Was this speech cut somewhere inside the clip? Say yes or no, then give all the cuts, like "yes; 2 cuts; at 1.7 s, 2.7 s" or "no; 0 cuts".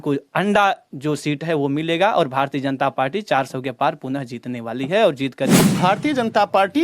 yes; 1 cut; at 5.6 s